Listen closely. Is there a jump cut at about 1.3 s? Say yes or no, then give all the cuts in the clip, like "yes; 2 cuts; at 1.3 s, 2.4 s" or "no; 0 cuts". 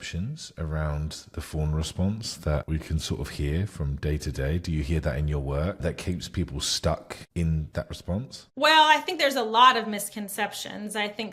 no; 0 cuts